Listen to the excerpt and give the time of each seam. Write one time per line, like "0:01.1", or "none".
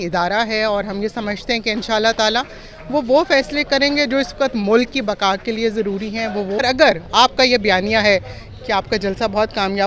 0:06.6